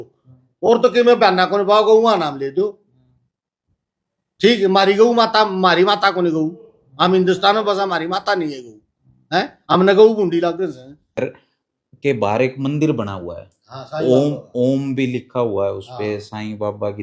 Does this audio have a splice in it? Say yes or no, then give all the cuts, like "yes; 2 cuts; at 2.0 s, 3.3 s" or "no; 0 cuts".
yes; 1 cut; at 11.2 s